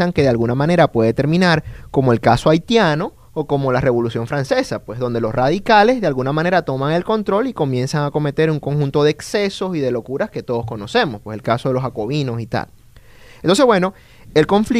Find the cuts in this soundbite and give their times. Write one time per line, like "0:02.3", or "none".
none